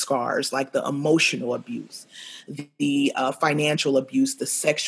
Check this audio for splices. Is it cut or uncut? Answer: uncut